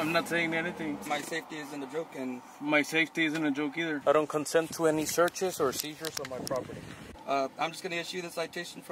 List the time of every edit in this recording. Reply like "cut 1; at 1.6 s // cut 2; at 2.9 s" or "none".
cut 1; at 1.0 s // cut 2; at 4.0 s // cut 3; at 7.0 s